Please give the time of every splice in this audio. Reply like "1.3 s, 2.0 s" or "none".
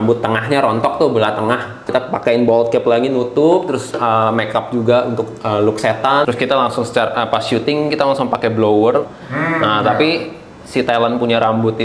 1.9 s, 6.2 s, 9.2 s